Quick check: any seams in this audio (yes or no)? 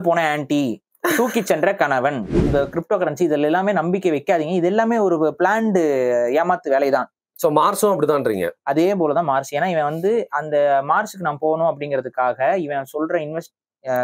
yes